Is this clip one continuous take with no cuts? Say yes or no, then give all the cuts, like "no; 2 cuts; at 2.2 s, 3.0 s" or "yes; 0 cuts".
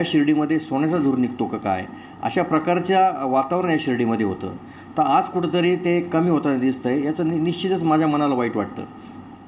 yes; 0 cuts